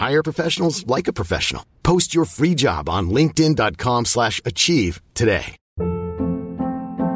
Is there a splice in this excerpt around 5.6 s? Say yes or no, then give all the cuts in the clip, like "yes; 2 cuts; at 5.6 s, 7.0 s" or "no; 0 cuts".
yes; 1 cut; at 5.6 s